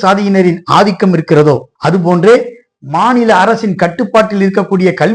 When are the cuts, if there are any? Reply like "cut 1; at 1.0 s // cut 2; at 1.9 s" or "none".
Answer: none